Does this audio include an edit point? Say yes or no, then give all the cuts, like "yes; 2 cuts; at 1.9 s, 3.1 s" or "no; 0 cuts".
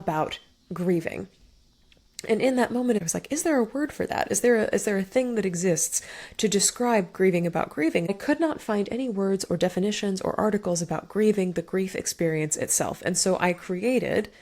yes; 2 cuts; at 3.0 s, 8.1 s